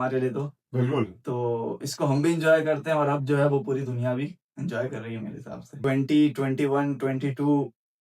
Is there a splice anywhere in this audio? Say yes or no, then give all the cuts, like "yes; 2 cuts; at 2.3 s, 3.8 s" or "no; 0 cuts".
yes; 1 cut; at 5.8 s